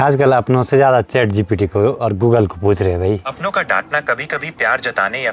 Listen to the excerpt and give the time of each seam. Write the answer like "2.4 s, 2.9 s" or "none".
none

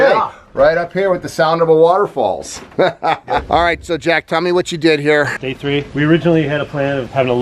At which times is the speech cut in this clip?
none

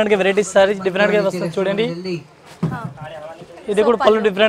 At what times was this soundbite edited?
none

